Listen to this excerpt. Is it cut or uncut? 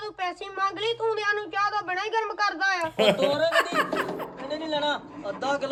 uncut